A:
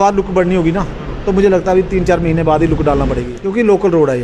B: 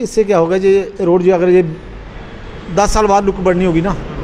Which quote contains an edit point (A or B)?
A